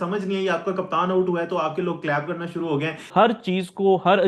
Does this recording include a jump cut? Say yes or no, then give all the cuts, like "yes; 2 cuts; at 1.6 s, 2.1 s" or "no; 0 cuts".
yes; 1 cut; at 3.1 s